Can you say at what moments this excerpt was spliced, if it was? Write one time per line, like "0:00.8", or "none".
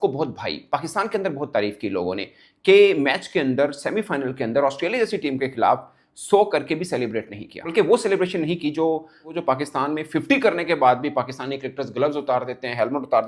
0:07.6
0:09.3